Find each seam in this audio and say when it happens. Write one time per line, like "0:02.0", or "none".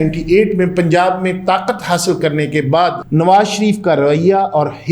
0:03.0